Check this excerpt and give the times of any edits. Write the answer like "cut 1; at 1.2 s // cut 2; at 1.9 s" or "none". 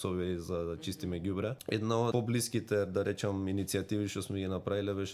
cut 1; at 1.9 s